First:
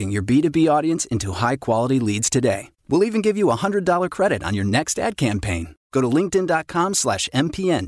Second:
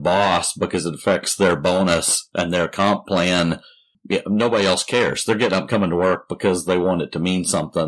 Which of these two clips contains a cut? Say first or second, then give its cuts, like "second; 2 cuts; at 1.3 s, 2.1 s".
second; 1 cut; at 3.9 s